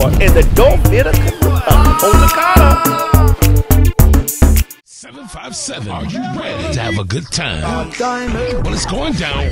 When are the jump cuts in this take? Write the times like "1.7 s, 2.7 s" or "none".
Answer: 4.7 s